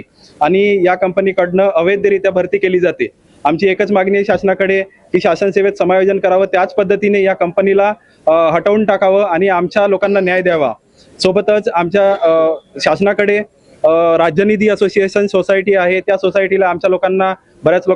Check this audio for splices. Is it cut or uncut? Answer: uncut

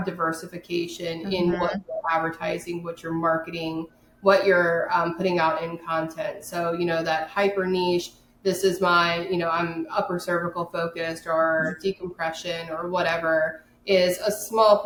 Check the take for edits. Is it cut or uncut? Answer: uncut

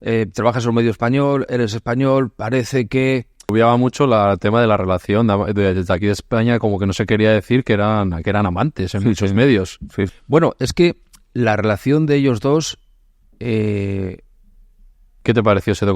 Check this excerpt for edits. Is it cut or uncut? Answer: cut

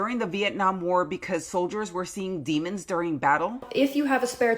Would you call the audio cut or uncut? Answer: cut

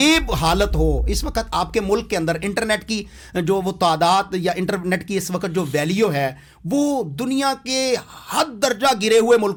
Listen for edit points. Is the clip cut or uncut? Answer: uncut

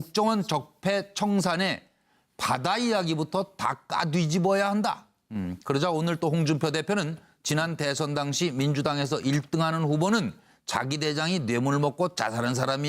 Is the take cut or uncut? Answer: cut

